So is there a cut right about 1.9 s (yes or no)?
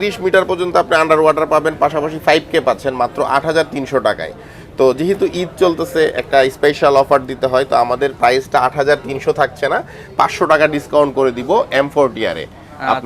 no